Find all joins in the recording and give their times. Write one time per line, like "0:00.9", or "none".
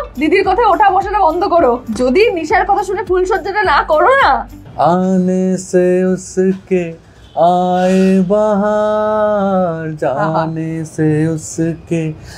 0:01.9
0:04.6